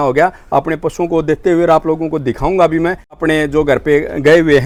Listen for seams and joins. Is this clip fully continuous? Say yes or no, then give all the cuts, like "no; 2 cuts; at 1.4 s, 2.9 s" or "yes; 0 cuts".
yes; 0 cuts